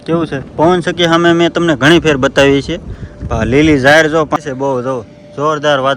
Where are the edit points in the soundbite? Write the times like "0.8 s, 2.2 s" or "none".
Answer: 4.4 s